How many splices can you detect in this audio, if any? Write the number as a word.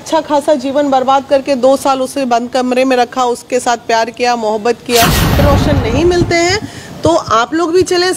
one